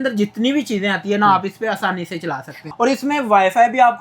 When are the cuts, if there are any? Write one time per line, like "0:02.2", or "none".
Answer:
0:02.6

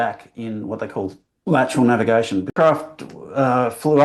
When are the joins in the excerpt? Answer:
0:02.5

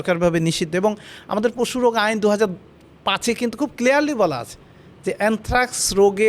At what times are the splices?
none

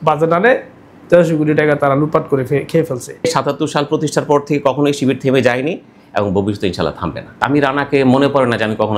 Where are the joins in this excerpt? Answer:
0:03.2
0:07.3

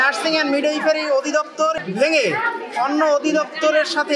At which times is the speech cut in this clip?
0:01.8

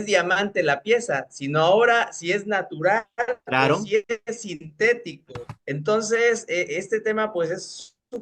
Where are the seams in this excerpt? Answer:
none

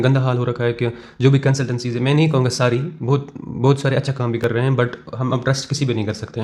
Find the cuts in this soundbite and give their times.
none

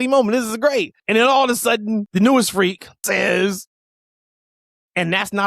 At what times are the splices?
0:01.0
0:02.1
0:03.0

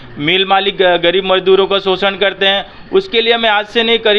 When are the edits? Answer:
none

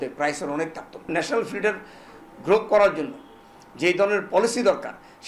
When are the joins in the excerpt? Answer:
0:01.1

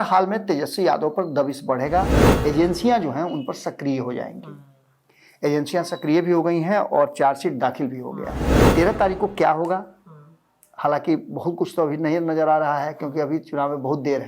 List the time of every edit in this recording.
0:02.2
0:08.5

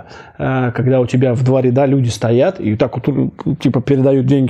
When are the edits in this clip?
none

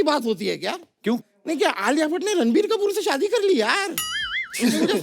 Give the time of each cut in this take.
0:01.5

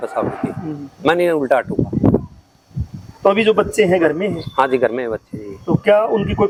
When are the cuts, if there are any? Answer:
none

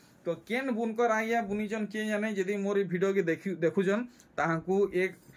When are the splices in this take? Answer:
none

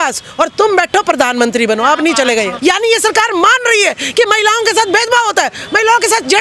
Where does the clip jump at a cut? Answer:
0:02.6

